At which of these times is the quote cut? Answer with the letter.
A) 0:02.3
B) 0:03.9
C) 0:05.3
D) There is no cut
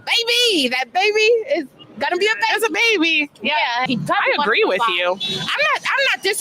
B